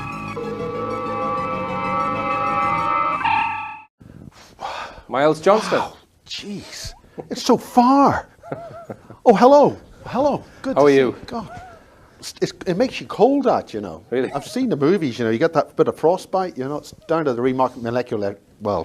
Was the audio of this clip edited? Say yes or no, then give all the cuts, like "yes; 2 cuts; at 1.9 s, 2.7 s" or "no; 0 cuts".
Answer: yes; 1 cut; at 16.2 s